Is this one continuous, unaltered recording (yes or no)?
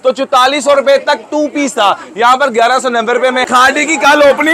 no